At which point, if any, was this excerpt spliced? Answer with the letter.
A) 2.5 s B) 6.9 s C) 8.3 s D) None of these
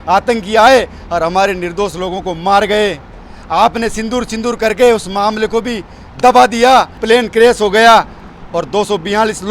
B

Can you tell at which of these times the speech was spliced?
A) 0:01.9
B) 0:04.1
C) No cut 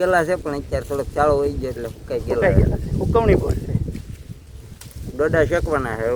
C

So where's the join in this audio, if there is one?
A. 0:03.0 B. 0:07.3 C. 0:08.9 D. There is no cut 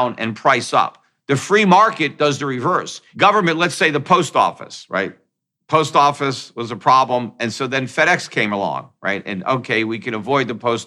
A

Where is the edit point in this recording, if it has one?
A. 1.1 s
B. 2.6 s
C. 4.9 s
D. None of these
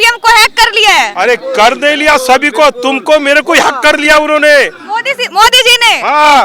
A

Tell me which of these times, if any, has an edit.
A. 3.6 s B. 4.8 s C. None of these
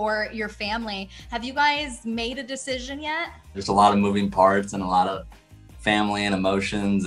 A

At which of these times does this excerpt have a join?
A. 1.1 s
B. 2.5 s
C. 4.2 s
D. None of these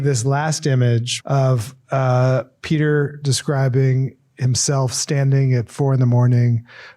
A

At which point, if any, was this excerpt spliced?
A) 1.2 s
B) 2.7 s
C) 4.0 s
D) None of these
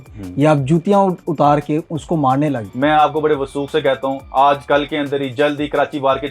B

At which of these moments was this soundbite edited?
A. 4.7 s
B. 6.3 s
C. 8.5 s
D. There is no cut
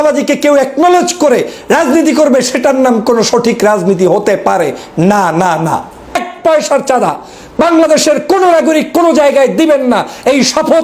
B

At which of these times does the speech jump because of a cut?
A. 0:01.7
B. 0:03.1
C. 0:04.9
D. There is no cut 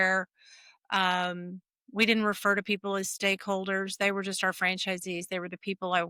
D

